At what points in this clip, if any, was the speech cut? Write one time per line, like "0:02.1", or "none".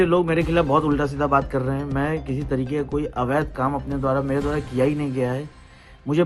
none